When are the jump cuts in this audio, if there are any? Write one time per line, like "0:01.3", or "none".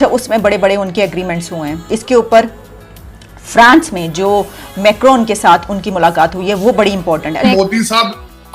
0:01.8
0:07.4